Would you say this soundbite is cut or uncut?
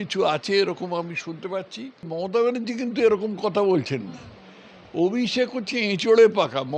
cut